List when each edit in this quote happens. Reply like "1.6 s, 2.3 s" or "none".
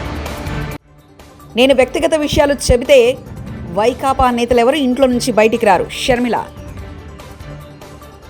0.9 s